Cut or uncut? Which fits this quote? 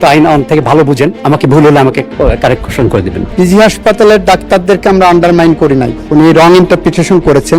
cut